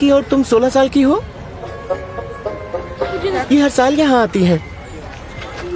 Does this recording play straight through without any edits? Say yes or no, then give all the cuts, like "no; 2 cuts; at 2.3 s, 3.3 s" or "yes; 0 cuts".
yes; 0 cuts